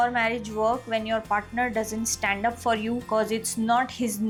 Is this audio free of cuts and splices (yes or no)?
yes